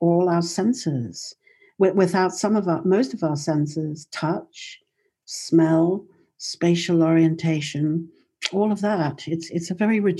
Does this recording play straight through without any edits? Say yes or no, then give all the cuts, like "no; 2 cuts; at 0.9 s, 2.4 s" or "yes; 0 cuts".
yes; 0 cuts